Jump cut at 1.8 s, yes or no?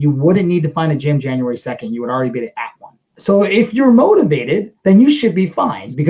no